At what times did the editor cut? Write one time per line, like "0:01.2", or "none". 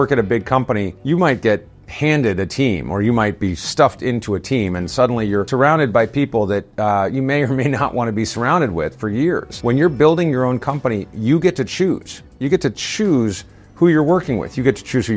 none